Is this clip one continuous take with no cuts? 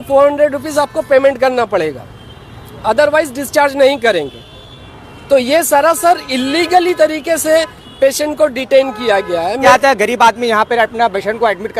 no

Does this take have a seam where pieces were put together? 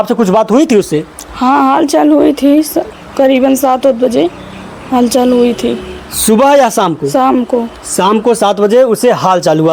no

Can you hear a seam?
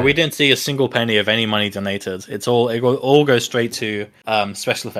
no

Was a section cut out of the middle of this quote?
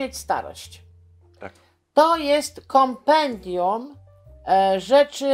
no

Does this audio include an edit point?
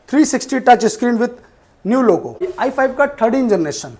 yes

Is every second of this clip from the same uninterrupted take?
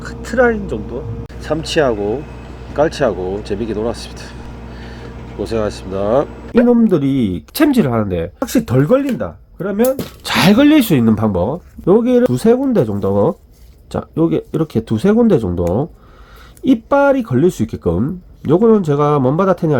no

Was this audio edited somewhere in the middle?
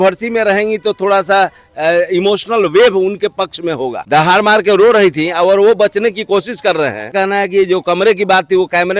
yes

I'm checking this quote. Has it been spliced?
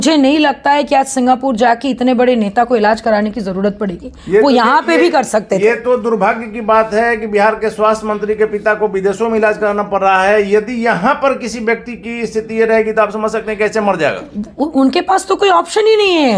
no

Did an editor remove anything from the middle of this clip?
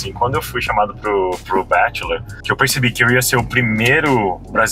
yes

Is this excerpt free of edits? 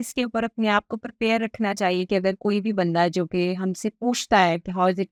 yes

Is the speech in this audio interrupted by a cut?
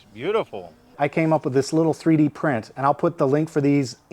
yes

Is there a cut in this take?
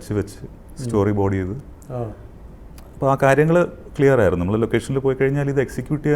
no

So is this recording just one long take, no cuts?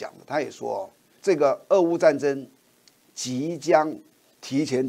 no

